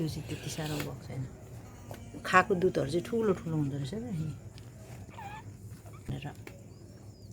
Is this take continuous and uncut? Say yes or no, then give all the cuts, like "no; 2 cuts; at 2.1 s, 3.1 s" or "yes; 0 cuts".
no; 1 cut; at 6.1 s